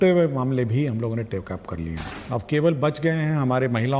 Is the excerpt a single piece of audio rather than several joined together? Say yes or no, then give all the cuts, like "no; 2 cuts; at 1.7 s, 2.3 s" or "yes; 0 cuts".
no; 1 cut; at 2.1 s